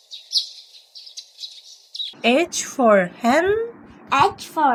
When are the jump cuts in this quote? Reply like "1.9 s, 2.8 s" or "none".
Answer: none